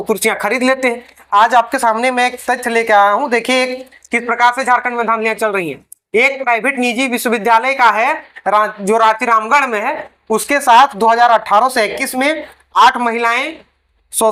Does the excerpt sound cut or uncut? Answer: uncut